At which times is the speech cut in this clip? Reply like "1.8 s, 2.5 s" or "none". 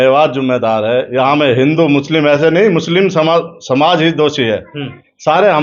none

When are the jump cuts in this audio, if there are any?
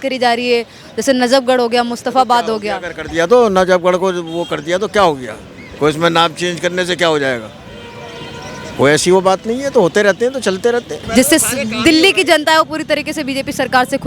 11.0 s

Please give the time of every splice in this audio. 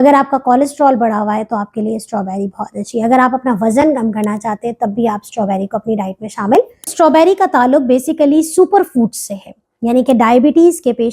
6.8 s

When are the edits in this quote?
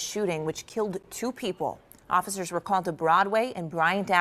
none

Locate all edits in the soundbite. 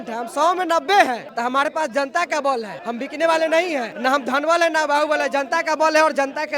1.3 s, 2.8 s, 3.9 s

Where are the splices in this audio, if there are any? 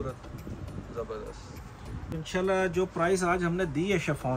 2.1 s

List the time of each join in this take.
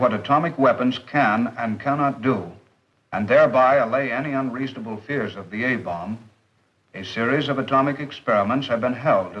1.4 s

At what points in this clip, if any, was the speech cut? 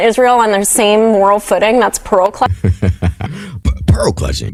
none

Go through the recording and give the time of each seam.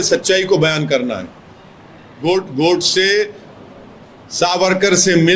2.1 s

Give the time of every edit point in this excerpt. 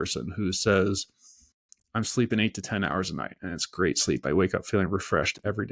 none

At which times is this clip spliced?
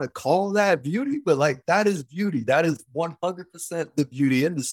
none

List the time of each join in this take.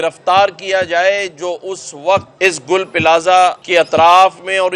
2.3 s, 3.6 s

